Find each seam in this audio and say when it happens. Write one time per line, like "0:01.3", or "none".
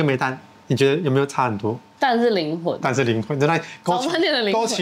none